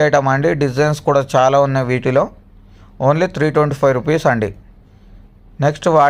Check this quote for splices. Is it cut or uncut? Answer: uncut